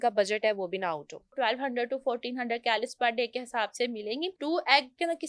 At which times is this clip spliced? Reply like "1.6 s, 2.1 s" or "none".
1.3 s, 4.4 s